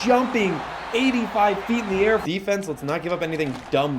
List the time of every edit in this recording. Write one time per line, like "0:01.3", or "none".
0:02.2